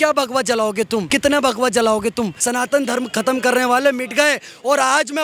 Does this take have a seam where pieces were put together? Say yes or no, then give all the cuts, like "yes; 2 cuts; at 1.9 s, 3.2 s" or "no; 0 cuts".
yes; 2 cuts; at 1.1 s, 2.4 s